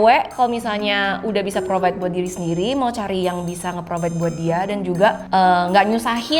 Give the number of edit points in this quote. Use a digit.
1